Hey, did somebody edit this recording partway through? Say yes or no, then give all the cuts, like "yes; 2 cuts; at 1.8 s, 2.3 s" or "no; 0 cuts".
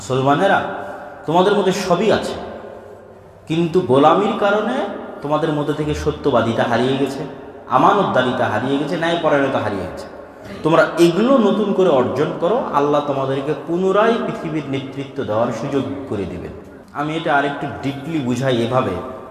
yes; 1 cut; at 16.8 s